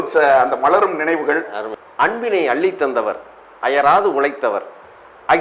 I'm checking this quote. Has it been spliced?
yes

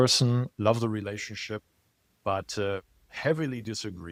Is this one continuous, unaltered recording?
yes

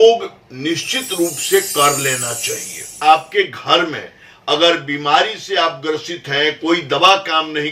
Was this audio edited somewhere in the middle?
yes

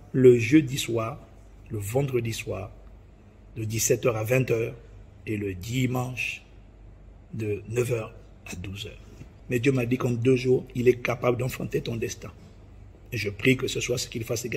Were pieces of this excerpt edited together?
no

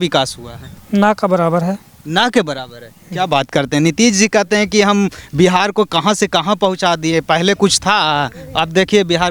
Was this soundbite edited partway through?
no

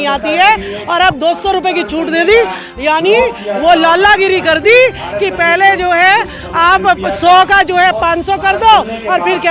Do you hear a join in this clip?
no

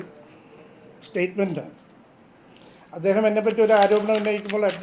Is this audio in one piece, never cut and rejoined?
yes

